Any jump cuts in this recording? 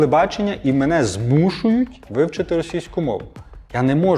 no; 0 cuts

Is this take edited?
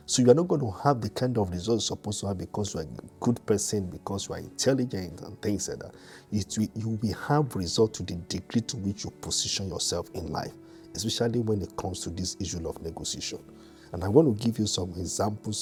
no; 0 cuts

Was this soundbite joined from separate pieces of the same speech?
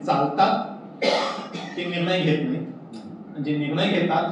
no; 0 cuts

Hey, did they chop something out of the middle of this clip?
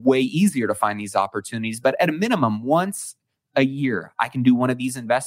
no; 0 cuts

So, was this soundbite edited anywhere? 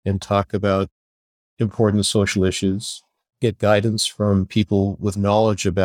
no; 0 cuts

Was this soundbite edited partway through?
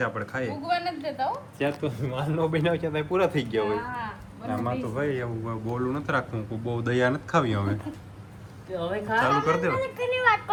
no; 0 cuts

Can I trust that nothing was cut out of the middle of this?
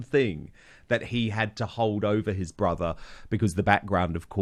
yes; 0 cuts

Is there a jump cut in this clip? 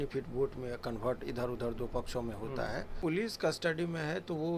yes; 1 cut; at 2.9 s

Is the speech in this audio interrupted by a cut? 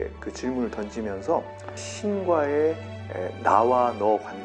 yes; 1 cut; at 1.9 s

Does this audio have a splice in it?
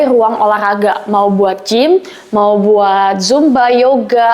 no; 0 cuts

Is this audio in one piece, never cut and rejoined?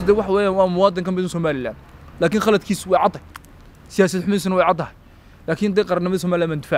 yes; 0 cuts

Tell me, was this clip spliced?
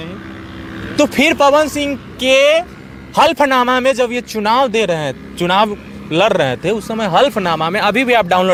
no; 0 cuts

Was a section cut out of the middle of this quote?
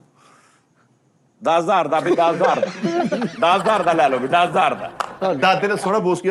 yes; 1 cut; at 5.2 s

